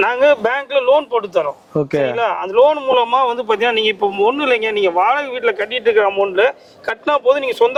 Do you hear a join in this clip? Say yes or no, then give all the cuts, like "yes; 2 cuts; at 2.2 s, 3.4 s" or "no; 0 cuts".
no; 0 cuts